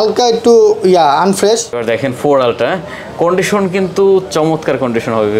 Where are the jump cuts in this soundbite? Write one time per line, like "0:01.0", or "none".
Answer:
0:01.8